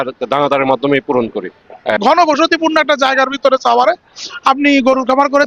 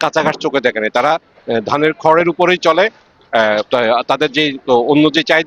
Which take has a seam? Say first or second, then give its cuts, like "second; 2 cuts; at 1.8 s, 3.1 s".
first; 1 cut; at 2.0 s